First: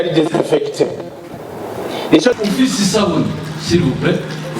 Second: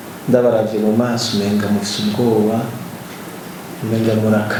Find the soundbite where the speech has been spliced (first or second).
first